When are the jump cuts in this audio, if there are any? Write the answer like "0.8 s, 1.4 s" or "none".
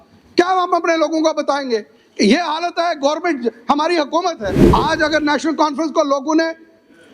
4.5 s